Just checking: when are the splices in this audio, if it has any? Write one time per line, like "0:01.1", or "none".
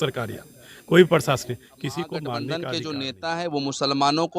0:02.4